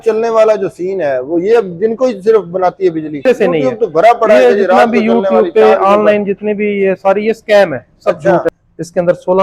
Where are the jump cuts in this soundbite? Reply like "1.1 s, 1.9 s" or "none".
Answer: 3.3 s, 8.5 s

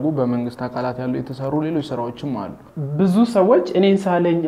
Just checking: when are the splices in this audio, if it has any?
2.6 s

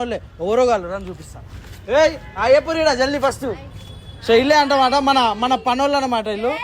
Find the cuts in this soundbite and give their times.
none

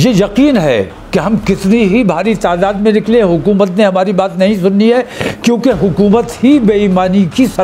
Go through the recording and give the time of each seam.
none

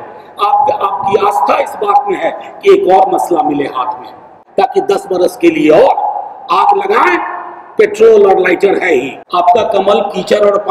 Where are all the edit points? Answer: 4.4 s, 9.2 s

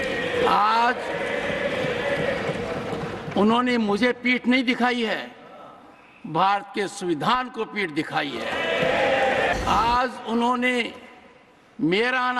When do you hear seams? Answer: 9.5 s

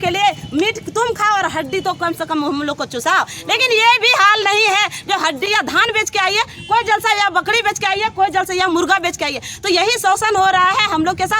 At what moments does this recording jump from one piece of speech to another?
5.5 s

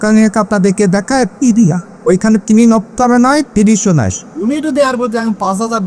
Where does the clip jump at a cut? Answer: 1.9 s, 4.2 s

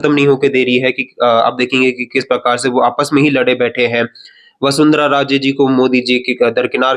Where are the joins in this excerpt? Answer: none

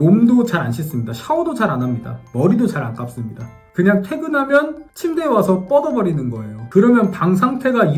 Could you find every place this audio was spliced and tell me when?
none

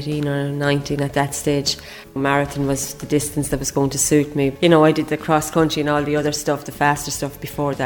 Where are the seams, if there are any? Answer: 2.2 s, 4.5 s

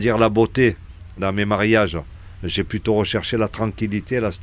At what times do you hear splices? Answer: 1.2 s

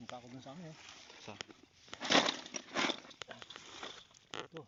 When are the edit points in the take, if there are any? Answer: none

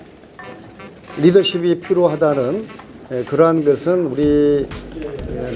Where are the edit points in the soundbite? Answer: none

